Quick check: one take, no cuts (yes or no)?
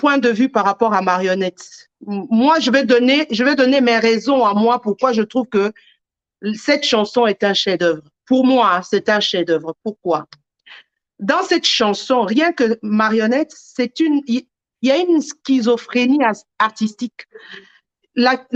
yes